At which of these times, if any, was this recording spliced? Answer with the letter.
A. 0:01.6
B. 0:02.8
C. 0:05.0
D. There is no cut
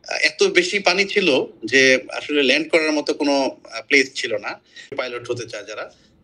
C